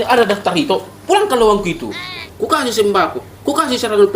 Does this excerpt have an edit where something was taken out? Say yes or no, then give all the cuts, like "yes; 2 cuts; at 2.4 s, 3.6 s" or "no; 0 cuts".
yes; 1 cut; at 2.2 s